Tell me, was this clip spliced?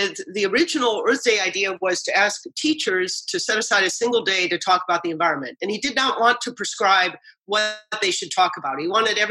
no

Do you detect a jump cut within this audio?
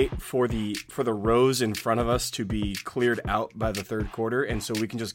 no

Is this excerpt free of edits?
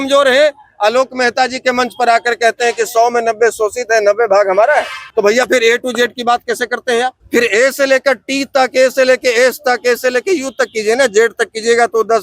no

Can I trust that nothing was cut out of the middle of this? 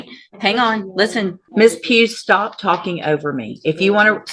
no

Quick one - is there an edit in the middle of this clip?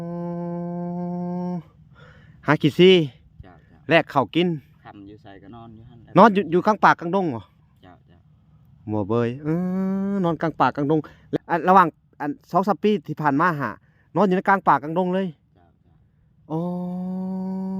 yes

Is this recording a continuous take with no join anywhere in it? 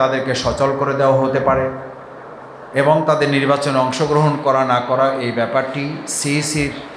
yes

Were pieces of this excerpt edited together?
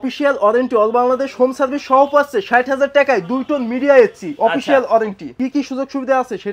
yes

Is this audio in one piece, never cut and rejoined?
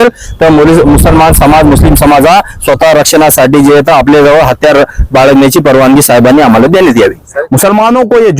no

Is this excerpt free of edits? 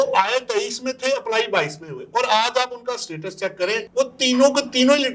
yes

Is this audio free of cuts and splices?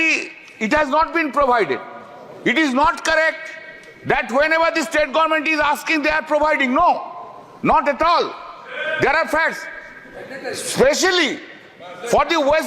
yes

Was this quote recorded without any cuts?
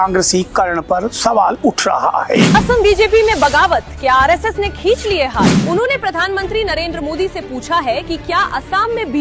no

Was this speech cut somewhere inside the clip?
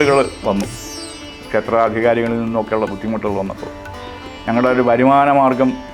no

